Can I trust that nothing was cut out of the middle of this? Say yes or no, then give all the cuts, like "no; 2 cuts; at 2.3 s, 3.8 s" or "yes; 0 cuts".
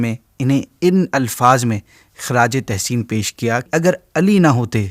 no; 1 cut; at 3.7 s